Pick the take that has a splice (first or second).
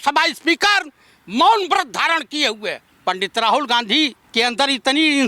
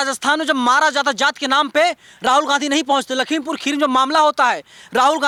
first